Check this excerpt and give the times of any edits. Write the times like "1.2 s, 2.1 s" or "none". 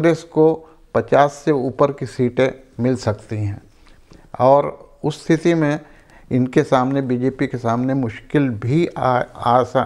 none